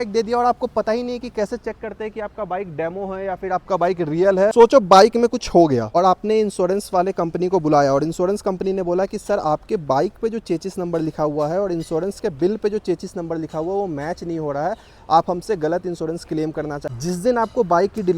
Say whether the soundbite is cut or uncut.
cut